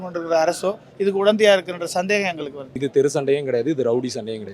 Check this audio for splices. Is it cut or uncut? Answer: cut